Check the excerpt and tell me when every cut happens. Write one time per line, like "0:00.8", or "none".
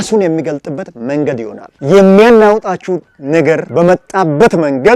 0:01.7